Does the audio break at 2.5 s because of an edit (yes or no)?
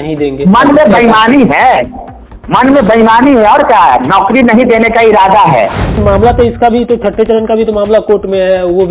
no